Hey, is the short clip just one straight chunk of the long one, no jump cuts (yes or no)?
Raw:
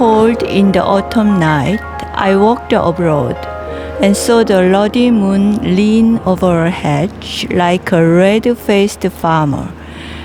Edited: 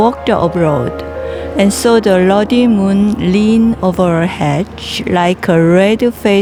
yes